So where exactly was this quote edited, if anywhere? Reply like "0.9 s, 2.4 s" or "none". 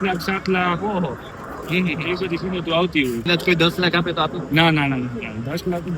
3.3 s